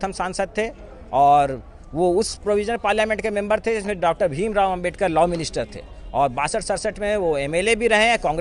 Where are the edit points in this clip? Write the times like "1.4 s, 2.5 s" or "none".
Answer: none